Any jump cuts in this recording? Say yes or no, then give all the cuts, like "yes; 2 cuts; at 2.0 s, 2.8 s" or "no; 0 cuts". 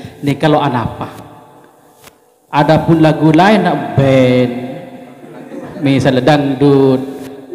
no; 0 cuts